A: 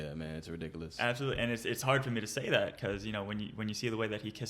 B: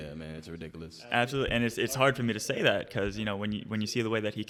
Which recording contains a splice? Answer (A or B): A